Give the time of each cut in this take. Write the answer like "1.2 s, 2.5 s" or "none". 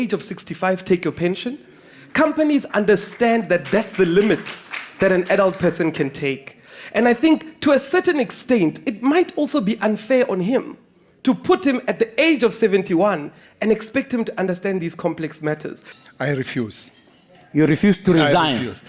15.9 s